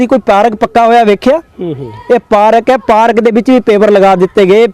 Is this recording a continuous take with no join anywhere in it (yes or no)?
yes